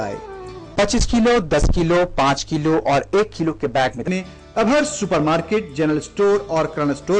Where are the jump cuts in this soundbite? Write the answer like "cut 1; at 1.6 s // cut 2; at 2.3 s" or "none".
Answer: none